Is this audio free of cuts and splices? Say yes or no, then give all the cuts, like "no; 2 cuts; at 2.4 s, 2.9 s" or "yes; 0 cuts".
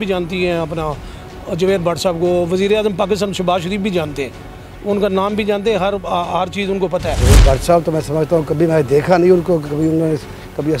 no; 1 cut; at 7.2 s